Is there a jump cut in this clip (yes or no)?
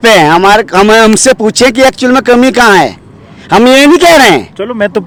no